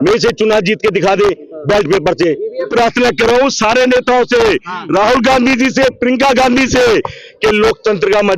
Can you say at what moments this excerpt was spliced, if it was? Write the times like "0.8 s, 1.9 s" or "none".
2.7 s